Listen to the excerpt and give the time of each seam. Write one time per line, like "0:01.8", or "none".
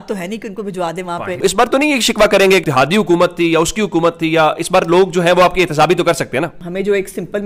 0:01.4
0:02.6
0:06.6